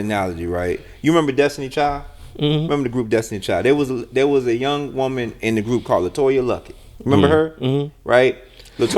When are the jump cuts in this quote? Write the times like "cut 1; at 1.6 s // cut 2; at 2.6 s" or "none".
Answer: none